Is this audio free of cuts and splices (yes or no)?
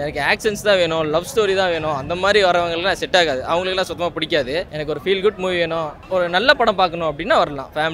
yes